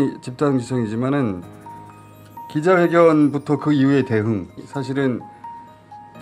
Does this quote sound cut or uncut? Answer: cut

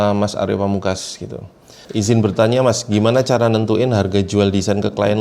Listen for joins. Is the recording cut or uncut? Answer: cut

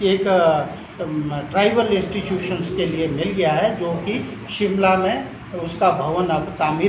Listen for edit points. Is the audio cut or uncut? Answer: uncut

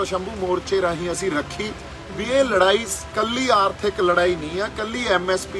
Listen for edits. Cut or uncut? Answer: uncut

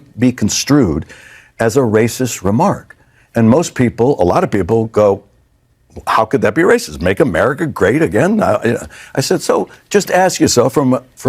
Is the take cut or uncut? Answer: uncut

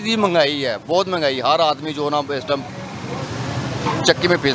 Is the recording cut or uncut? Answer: uncut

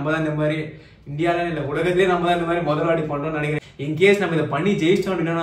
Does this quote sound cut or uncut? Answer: cut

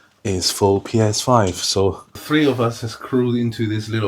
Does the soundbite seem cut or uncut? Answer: cut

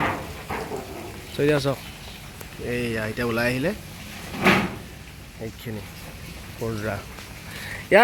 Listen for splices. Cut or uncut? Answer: uncut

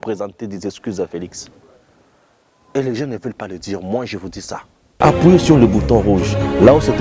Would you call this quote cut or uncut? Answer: cut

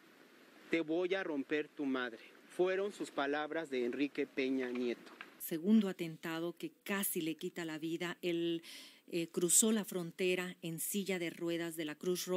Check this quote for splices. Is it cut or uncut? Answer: cut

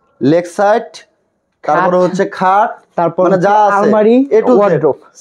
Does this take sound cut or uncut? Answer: uncut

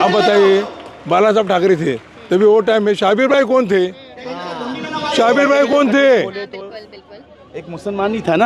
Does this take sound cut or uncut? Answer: uncut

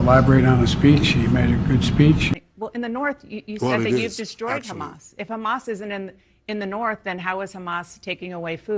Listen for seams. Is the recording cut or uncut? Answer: cut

